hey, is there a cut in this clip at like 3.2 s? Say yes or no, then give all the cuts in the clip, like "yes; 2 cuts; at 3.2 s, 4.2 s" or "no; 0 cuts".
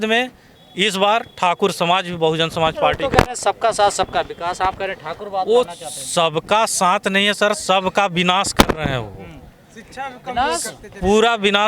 no; 0 cuts